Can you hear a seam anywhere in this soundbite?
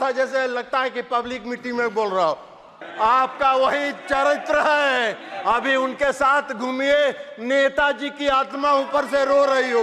yes; 1 cut; at 2.8 s

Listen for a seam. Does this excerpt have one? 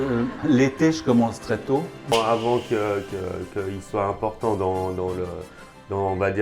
yes; 1 cut; at 2.1 s

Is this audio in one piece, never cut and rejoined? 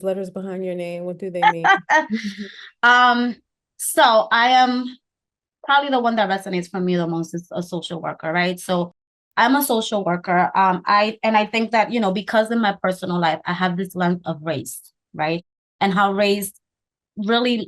yes; 0 cuts

